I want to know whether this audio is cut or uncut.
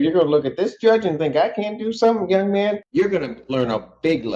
cut